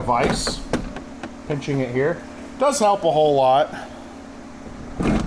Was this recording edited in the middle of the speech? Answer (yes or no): no